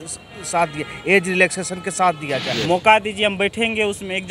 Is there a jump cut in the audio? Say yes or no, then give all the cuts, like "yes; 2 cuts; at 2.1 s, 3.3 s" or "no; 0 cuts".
yes; 1 cut; at 2.5 s